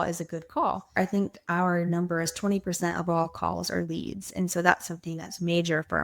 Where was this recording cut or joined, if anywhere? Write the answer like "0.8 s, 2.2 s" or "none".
0.9 s